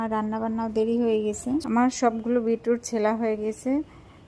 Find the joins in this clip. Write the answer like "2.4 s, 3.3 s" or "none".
1.6 s